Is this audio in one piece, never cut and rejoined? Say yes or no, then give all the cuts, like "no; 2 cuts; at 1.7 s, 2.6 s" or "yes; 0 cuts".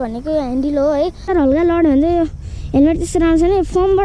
no; 1 cut; at 1.3 s